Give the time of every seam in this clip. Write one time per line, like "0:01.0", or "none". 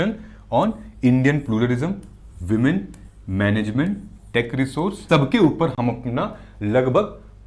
0:05.0